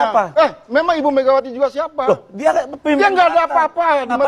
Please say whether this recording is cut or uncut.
uncut